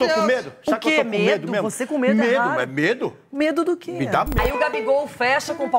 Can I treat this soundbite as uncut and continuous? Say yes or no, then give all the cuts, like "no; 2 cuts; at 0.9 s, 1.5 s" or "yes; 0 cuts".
no; 1 cut; at 4.4 s